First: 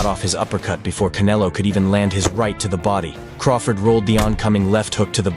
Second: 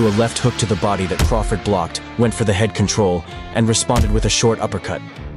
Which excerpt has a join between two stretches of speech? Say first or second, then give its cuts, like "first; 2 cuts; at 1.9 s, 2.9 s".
second; 1 cut; at 1.1 s